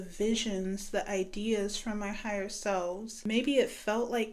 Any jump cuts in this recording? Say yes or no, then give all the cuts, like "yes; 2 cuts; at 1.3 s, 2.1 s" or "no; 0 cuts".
yes; 1 cut; at 3.2 s